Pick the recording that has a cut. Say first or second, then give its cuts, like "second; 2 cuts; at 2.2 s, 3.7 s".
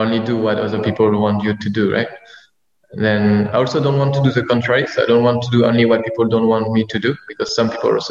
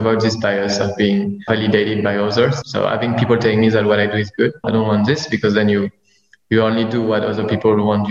second; 3 cuts; at 1.4 s, 2.6 s, 4.6 s